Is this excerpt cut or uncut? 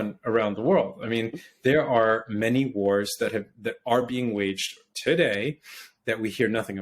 uncut